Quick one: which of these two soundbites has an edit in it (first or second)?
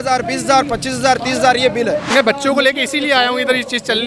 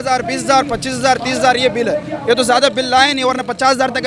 first